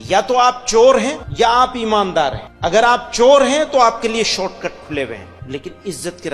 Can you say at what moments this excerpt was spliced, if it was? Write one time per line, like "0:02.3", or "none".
0:01.2
0:02.5
0:05.3